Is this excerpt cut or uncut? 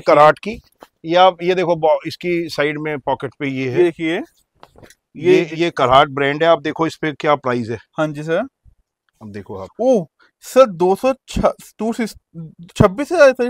uncut